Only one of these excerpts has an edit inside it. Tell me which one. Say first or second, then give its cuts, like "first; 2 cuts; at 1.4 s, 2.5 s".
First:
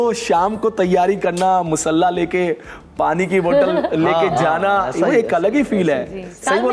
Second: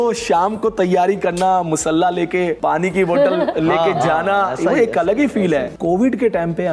second; 2 cuts; at 2.6 s, 5.7 s